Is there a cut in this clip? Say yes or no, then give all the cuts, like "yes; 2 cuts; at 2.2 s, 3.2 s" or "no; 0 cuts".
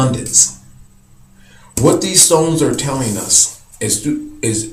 no; 0 cuts